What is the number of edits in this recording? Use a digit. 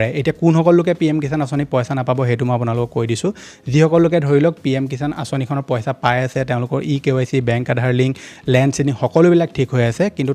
0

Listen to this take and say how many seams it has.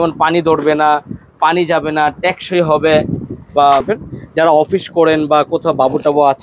1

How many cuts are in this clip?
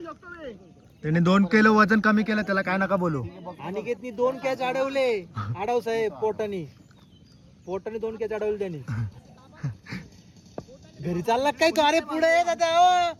0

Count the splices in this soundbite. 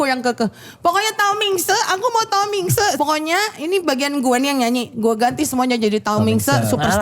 1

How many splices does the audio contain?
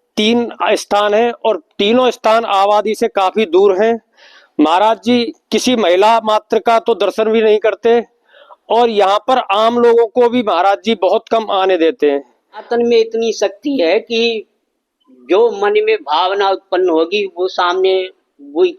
1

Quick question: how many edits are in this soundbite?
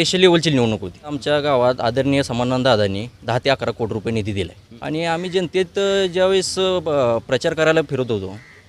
2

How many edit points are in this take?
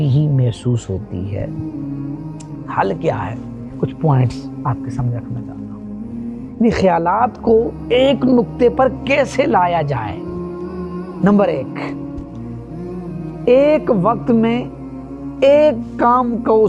2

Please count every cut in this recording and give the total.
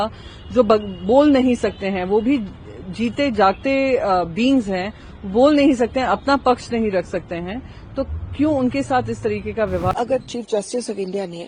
1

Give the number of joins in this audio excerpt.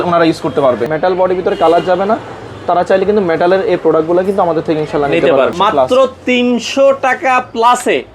2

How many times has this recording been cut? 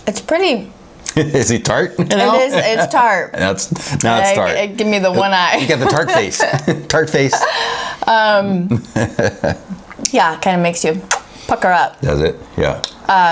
0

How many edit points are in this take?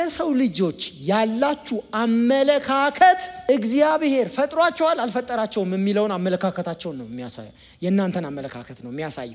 1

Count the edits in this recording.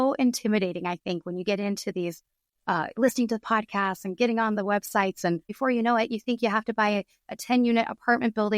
1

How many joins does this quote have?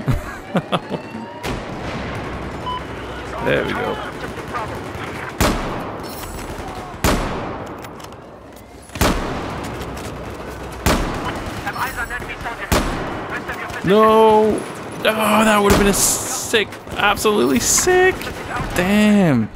1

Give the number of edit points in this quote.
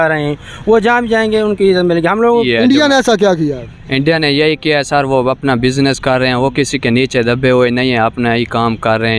1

